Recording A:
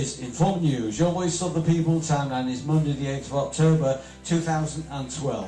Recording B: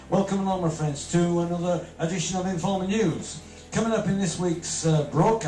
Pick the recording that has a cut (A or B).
A